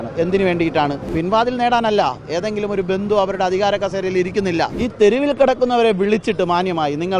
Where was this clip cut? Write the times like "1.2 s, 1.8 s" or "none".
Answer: 1.0 s, 4.8 s